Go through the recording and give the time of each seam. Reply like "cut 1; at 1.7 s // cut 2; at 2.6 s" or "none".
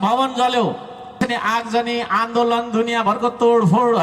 cut 1; at 1.2 s